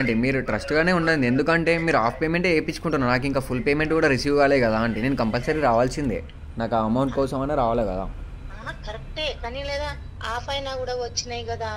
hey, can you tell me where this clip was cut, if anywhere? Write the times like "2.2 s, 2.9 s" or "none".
none